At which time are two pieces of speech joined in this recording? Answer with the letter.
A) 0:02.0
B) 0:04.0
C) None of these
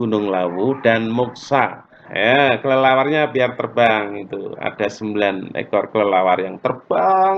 A